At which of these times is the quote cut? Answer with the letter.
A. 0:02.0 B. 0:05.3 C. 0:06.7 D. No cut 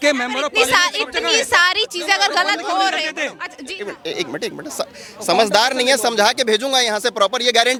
D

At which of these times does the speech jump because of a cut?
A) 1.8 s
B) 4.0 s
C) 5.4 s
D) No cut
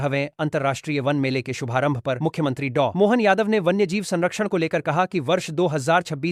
D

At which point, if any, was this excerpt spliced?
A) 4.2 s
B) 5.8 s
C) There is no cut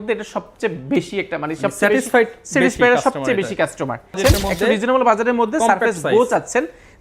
A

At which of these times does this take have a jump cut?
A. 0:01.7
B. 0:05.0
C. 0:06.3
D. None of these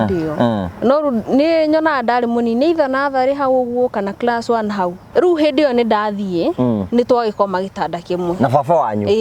B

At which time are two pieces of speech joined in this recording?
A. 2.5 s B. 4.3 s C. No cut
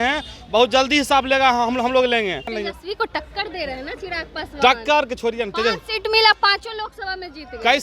A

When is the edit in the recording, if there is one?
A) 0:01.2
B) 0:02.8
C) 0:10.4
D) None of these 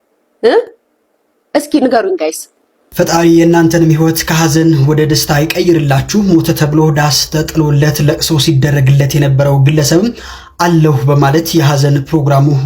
B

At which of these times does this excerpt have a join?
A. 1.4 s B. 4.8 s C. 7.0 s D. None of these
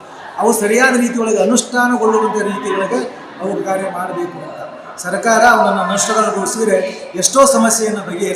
D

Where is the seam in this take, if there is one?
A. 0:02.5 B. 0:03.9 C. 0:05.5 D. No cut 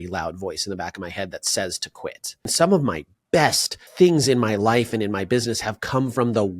A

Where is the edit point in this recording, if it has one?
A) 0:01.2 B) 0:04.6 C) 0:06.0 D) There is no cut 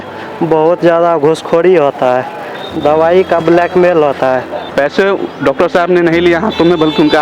B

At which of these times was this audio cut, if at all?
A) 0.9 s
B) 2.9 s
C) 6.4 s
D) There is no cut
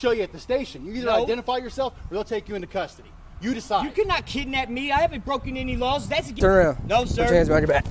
C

